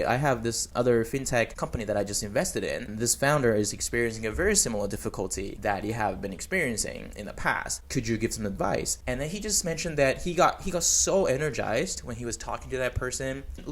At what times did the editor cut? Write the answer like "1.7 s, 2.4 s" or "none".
2.9 s, 5.5 s, 7.8 s, 8.9 s